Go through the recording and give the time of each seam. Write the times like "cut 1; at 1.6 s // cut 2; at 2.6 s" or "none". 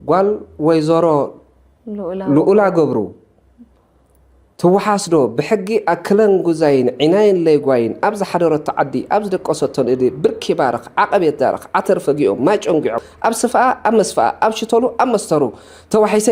cut 1; at 13.0 s